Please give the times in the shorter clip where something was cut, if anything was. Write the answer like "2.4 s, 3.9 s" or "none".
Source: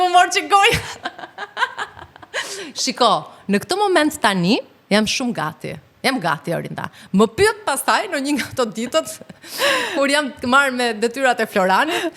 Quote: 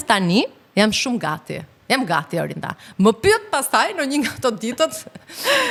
none